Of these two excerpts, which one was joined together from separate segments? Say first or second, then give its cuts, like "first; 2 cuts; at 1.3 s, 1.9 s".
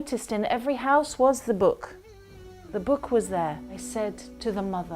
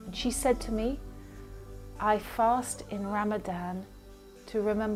first; 1 cut; at 3.7 s